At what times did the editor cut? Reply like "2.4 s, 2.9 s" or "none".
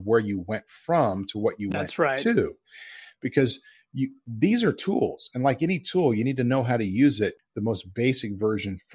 7.5 s